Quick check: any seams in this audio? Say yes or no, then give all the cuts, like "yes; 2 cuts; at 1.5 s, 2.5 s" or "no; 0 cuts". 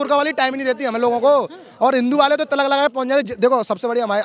no; 0 cuts